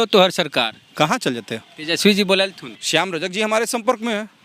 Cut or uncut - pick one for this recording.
cut